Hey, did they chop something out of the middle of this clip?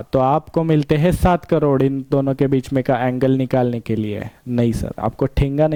no; 0 cuts

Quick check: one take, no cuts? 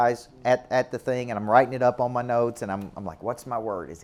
yes; 0 cuts

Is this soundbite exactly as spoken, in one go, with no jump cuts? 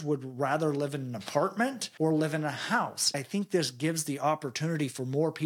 no; 2 cuts; at 1.8 s, 3.1 s

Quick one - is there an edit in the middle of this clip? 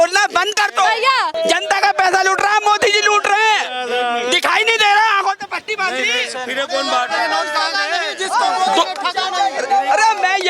yes; 1 cut; at 1.3 s

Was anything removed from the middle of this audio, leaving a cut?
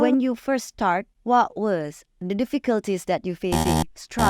yes; 2 cuts; at 1.1 s, 2.2 s

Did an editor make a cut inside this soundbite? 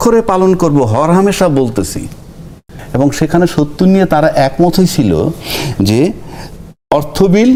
no; 0 cuts

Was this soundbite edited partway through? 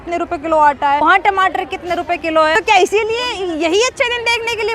yes; 2 cuts; at 1.0 s, 2.5 s

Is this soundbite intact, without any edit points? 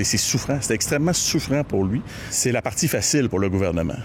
no; 1 cut; at 2.3 s

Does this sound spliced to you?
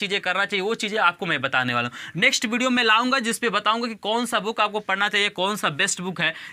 no; 0 cuts

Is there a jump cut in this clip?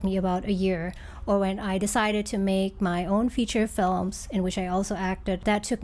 no; 0 cuts

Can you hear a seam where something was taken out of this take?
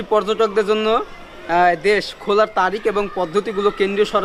no; 0 cuts

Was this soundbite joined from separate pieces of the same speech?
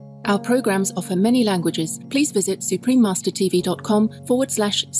yes; 2 cuts; at 1.9 s, 4.2 s

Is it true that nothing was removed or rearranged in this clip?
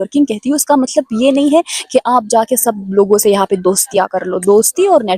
yes; 0 cuts

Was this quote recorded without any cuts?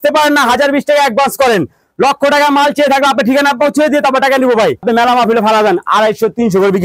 no; 1 cut; at 4.8 s

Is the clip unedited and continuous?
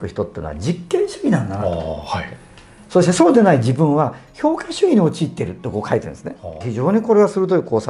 no; 1 cut; at 6.7 s

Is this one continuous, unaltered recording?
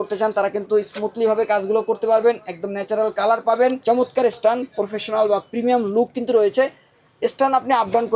no; 1 cut; at 3.8 s

